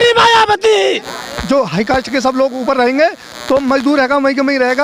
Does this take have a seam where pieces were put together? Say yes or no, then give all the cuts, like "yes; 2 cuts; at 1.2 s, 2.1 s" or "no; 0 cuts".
yes; 1 cut; at 1.0 s